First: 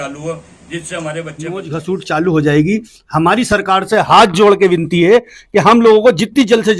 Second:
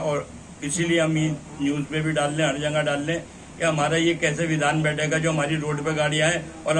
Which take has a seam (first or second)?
first